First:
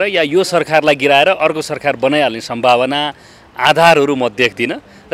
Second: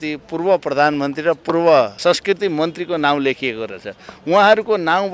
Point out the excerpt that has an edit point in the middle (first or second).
second